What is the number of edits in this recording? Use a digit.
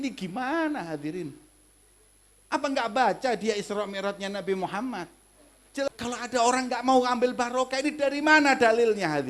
1